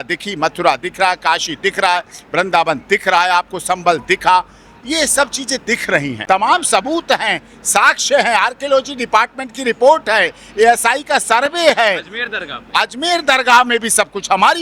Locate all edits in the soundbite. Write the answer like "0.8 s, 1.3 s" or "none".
6.2 s

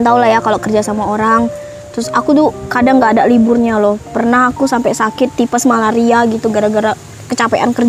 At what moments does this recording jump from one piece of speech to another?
none

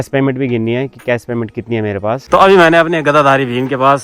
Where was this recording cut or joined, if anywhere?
2.2 s

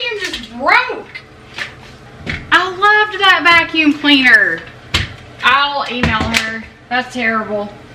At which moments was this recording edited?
2.1 s

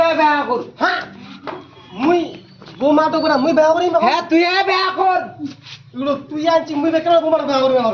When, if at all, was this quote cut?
3.9 s

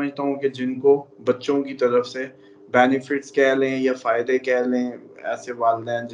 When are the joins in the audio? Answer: none

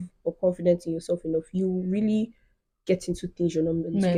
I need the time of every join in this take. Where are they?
none

